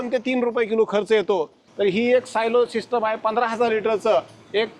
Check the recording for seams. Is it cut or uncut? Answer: cut